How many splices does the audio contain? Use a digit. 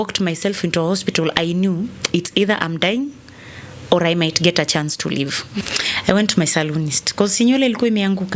1